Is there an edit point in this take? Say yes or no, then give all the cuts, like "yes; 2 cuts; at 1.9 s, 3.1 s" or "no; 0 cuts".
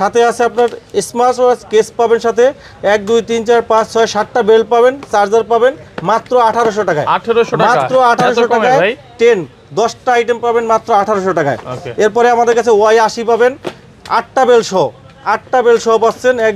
no; 0 cuts